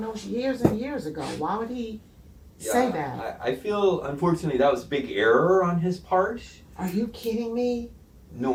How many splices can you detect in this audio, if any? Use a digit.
0